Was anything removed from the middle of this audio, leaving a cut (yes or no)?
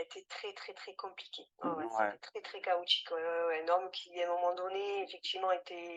no